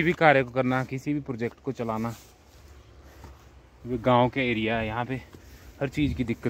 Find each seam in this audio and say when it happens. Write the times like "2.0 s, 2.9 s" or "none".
none